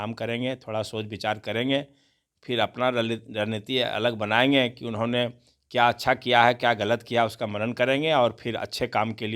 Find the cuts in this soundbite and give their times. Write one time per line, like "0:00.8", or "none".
none